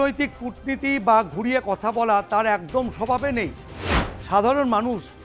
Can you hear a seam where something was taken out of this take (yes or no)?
yes